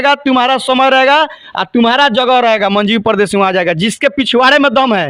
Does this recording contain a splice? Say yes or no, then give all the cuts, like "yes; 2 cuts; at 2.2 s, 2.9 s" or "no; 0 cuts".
no; 0 cuts